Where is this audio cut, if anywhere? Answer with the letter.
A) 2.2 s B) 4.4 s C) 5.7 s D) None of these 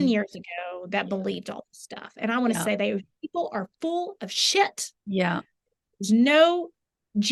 D